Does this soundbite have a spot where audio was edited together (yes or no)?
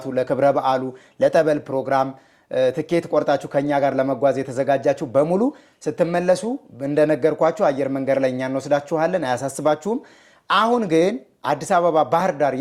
no